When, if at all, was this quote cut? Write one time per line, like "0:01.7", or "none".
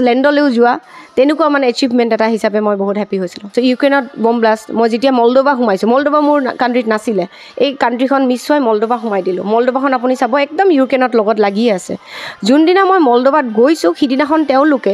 0:03.4